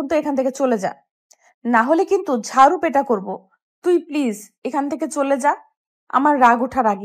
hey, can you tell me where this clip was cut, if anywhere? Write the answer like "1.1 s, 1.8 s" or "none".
none